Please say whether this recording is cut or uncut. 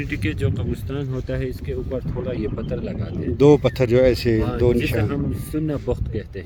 uncut